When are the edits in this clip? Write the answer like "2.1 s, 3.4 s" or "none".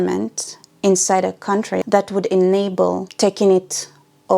1.8 s